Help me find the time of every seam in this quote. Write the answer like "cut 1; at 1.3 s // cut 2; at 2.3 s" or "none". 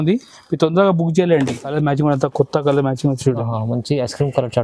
cut 1; at 1.6 s